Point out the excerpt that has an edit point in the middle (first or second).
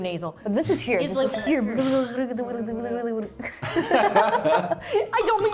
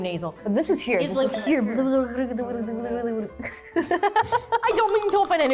second